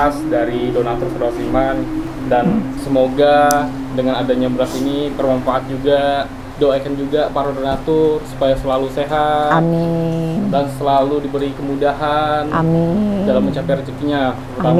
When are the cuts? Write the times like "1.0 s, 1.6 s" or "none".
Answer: none